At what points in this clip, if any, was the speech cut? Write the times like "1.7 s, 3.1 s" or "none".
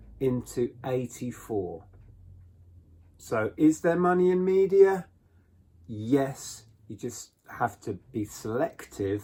none